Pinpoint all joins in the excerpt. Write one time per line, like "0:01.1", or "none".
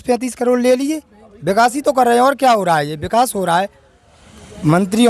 none

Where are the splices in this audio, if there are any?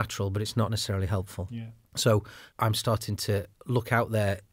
0:01.4
0:02.4

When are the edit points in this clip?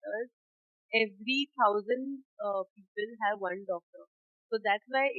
none

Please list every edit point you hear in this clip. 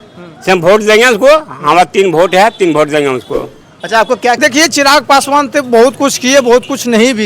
0:04.4

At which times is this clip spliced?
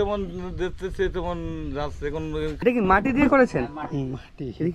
0:02.6

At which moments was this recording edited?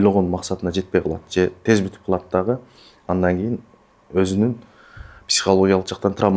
none

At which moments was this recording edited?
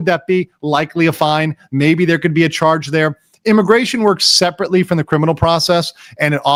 none

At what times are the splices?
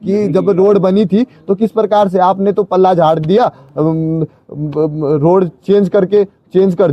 none

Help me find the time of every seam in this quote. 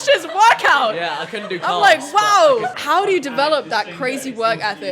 0:02.8

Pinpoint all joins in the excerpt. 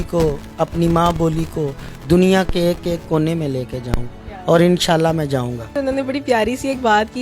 0:05.7

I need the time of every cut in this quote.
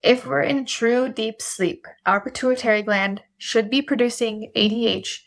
0:01.9

